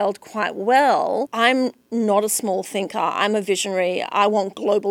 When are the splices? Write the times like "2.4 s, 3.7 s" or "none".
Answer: 1.3 s

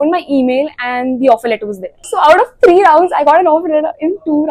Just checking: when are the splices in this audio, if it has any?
none

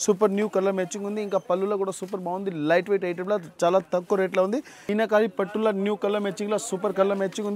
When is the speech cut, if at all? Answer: 4.9 s

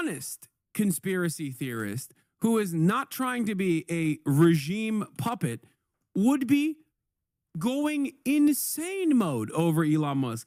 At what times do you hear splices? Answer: none

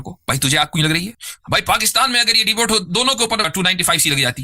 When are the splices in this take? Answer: 1.3 s, 3.5 s

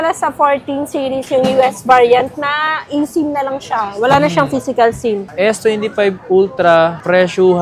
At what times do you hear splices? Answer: 5.3 s

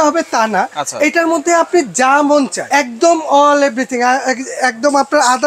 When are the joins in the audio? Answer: 2.6 s

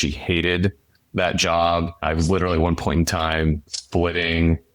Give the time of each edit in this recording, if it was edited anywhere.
2.0 s, 3.7 s

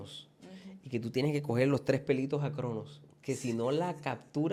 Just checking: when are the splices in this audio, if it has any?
none

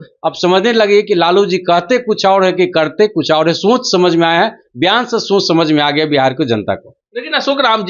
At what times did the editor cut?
none

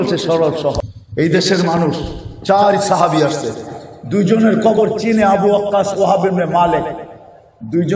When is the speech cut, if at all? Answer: 0.9 s

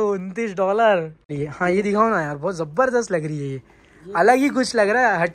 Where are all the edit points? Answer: 1.4 s

